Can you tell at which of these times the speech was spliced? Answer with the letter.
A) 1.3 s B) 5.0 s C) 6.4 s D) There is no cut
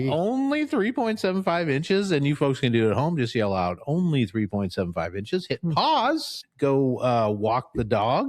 C